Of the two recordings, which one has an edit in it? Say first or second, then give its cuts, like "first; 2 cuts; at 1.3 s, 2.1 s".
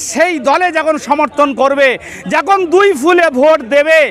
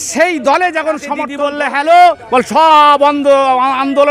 second; 1 cut; at 1.2 s